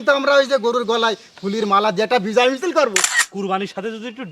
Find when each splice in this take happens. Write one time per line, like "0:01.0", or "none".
0:03.0